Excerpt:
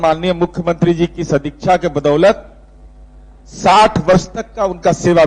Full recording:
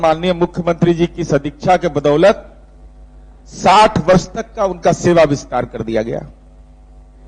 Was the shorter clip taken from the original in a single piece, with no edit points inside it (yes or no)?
yes